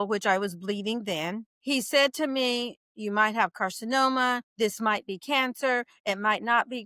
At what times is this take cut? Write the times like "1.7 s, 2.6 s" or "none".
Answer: 1.5 s, 4.5 s